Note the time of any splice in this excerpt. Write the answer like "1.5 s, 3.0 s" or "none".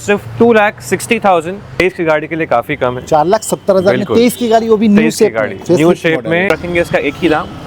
1.7 s, 6.5 s